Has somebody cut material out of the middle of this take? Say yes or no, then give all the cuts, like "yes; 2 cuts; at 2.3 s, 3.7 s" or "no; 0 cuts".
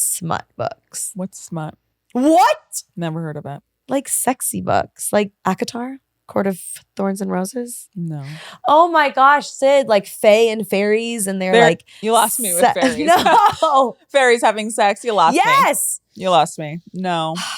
yes; 2 cuts; at 3.7 s, 5.3 s